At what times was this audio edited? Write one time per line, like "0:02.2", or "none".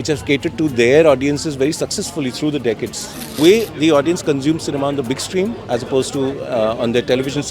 0:03.4

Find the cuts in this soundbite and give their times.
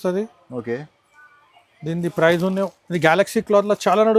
0:02.8

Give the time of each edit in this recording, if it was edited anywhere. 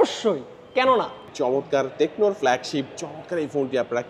0:01.3

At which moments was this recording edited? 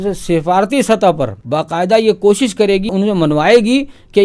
0:01.4
0:02.9

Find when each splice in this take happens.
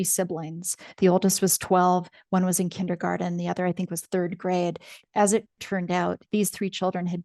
0:05.0

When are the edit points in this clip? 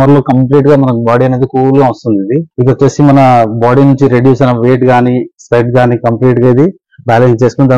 0:02.5

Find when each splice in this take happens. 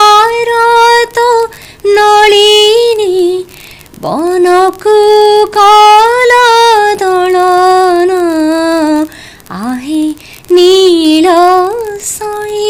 none

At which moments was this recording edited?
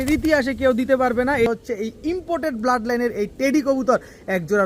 0:01.5

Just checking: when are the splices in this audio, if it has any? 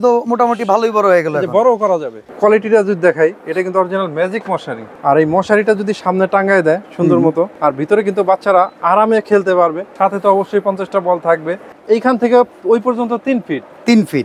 0:02.3
0:04.9
0:07.5
0:09.8
0:11.6

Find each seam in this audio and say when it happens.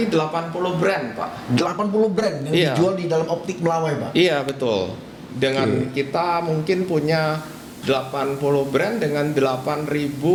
none

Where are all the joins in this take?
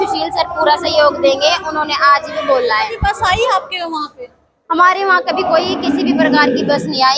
0:02.9

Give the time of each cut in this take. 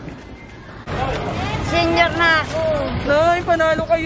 0:01.0

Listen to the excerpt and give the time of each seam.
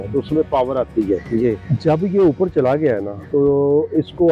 0:01.7
0:03.1

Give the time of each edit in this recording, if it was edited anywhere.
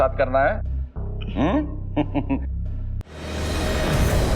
0:03.2

